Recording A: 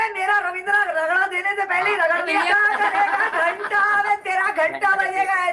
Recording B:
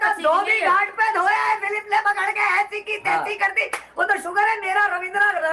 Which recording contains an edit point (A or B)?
A